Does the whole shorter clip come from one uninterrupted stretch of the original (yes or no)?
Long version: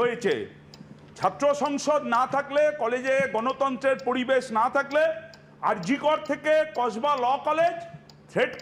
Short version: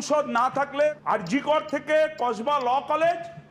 no